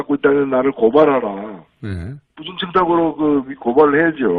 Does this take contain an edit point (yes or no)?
no